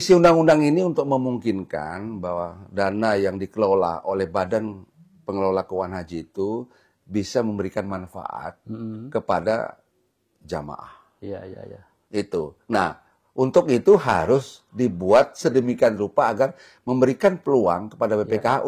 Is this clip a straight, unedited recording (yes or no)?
yes